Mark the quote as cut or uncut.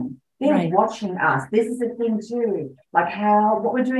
uncut